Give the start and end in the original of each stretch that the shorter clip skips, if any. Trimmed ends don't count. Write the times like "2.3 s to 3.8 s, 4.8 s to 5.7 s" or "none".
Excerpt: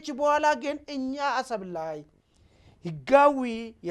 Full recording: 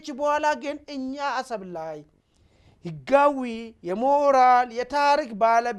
none